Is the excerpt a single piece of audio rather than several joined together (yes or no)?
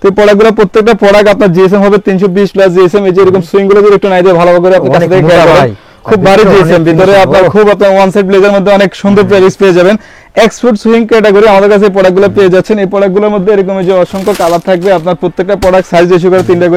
yes